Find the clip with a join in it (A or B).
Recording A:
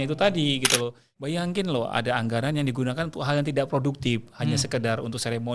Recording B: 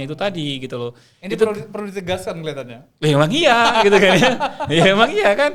A